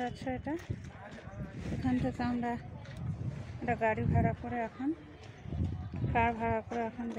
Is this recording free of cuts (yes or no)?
yes